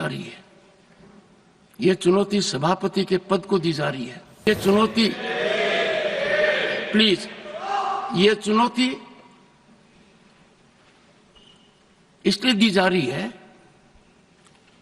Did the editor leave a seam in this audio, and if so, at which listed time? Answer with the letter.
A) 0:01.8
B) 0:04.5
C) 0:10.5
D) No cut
B